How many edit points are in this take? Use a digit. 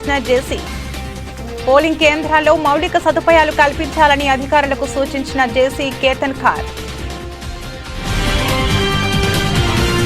1